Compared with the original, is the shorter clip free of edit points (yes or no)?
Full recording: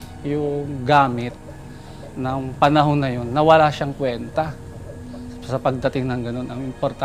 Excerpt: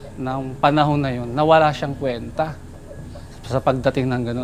yes